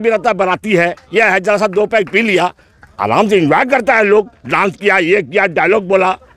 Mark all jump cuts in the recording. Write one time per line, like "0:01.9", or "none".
none